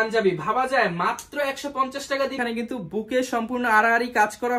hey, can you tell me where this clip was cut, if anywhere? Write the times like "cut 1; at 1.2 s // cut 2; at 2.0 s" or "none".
cut 1; at 2.4 s